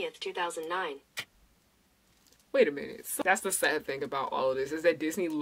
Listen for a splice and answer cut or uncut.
cut